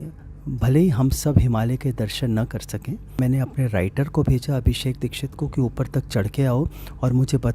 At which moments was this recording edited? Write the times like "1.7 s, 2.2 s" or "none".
3.1 s